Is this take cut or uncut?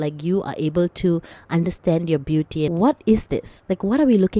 cut